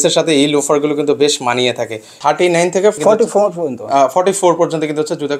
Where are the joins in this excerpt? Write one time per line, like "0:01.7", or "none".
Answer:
0:02.1
0:03.0